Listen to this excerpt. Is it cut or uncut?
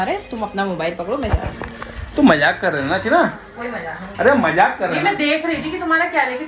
uncut